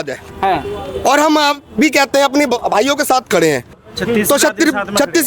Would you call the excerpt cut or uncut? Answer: uncut